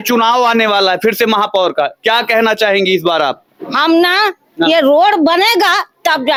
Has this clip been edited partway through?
no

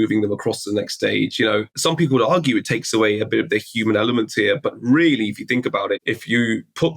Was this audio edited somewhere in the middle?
yes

